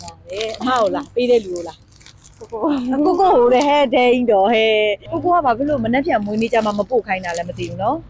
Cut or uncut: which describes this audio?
cut